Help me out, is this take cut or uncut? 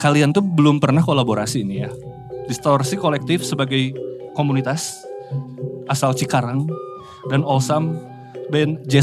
uncut